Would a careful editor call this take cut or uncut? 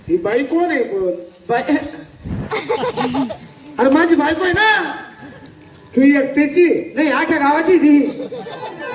uncut